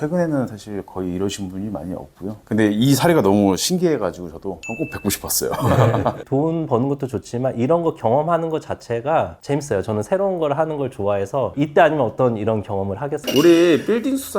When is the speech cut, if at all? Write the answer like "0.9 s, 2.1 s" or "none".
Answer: 2.4 s, 6.2 s